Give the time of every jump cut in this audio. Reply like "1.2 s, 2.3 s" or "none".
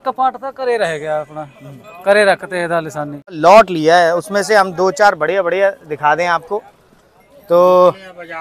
3.4 s

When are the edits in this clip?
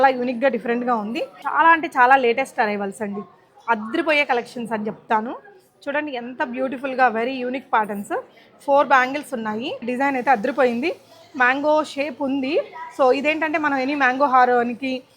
1.4 s, 9.8 s

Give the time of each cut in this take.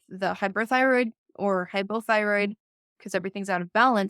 2.9 s

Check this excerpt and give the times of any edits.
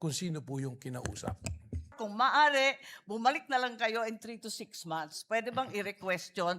2.0 s

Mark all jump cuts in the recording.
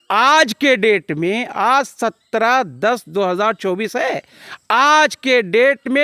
none

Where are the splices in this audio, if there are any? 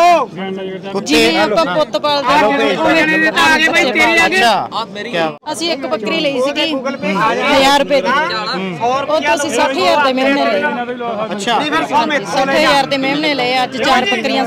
5.4 s

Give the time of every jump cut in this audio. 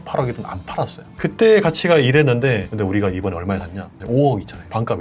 1.1 s

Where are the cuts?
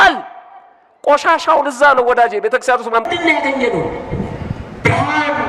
none

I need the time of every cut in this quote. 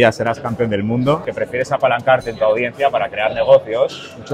1.3 s

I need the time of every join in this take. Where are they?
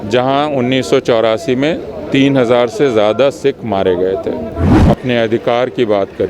4.7 s

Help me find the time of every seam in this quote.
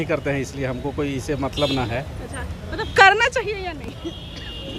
none

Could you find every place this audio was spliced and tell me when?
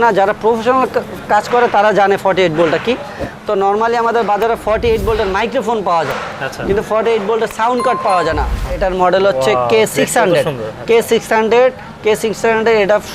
8.8 s

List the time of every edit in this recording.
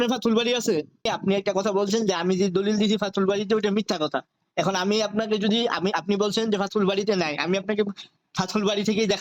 1.1 s

